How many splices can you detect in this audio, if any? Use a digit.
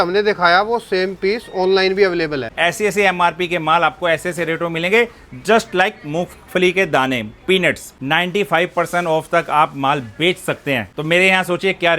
3